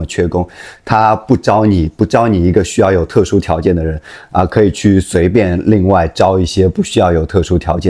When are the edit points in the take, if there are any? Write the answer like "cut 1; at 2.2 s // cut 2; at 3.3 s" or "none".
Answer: none